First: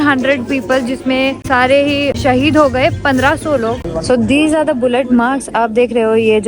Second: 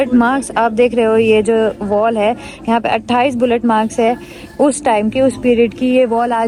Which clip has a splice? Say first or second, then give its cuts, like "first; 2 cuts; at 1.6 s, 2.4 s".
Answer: first; 3 cuts; at 1.4 s, 2.1 s, 3.8 s